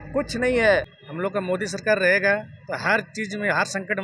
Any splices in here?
yes; 1 cut; at 1.0 s

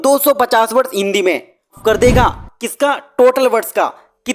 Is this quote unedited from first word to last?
no; 1 cut; at 1.8 s

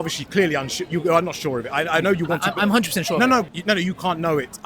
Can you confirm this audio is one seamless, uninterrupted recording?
no; 1 cut; at 3.5 s

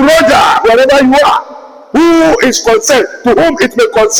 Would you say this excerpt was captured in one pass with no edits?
yes; 0 cuts

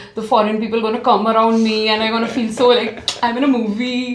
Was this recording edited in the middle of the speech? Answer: no; 0 cuts

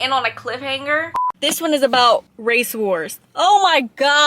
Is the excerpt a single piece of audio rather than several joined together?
no; 1 cut; at 1.2 s

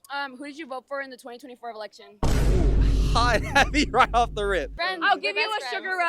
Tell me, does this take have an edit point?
yes; 1 cut; at 4.8 s

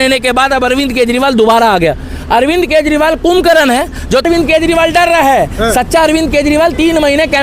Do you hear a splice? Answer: yes; 1 cut; at 4.3 s

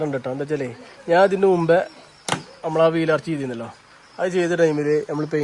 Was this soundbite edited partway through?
no; 0 cuts

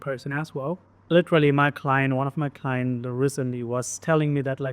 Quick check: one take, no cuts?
no; 1 cut; at 0.9 s

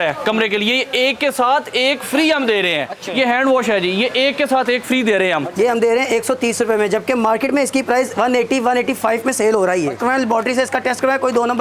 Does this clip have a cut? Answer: yes; 3 cuts; at 3.0 s, 5.5 s, 10.0 s

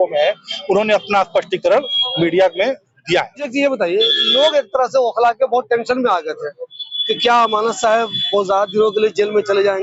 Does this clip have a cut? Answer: no; 0 cuts

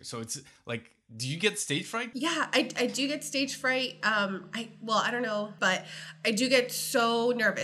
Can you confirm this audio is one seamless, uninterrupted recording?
no; 2 cuts; at 2.1 s, 5.5 s

